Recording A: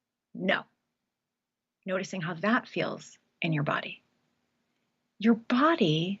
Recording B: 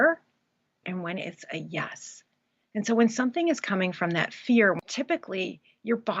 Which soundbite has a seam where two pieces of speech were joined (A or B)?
B